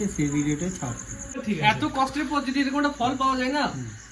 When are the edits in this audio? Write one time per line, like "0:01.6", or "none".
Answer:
0:01.4